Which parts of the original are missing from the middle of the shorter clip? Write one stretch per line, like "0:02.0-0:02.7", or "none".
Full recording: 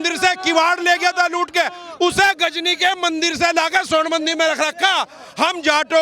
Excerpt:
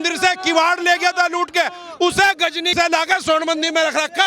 0:02.7-0:03.4